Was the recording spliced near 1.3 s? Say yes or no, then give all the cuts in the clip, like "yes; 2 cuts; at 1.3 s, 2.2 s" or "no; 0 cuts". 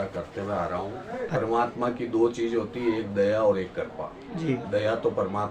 yes; 1 cut; at 1.3 s